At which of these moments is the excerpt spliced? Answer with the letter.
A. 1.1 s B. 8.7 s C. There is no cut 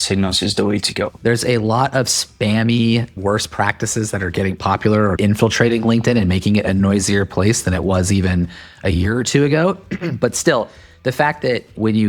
A